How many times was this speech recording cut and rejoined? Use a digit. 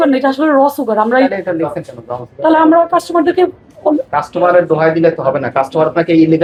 0